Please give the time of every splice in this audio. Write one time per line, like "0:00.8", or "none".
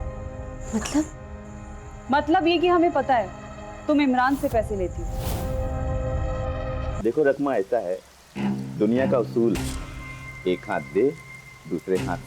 0:06.9